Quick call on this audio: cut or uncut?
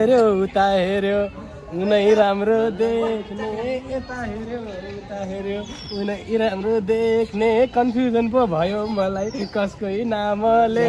uncut